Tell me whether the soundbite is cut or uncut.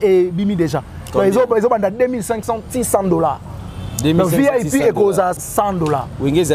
cut